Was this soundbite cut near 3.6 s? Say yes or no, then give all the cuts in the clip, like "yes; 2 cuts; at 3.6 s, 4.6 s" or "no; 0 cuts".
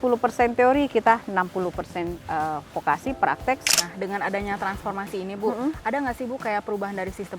yes; 1 cut; at 3.6 s